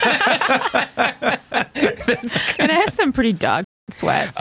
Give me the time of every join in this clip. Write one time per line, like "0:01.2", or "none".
none